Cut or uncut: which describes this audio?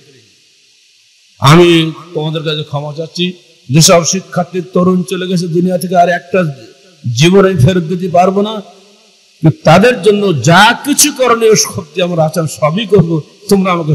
uncut